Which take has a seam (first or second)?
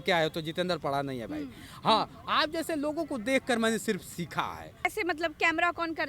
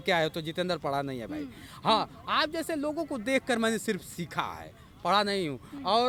first